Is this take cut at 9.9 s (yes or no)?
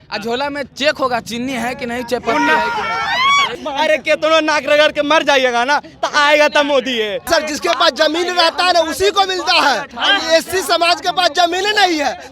yes